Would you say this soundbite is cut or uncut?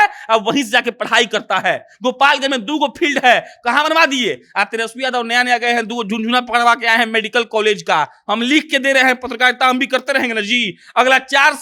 uncut